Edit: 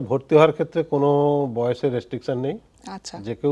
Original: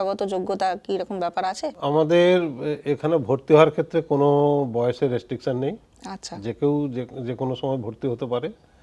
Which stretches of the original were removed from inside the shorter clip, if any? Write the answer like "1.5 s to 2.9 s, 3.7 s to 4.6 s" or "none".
none